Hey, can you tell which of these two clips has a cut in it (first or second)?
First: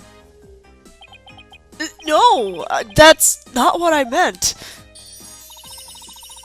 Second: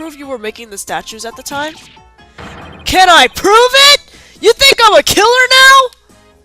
second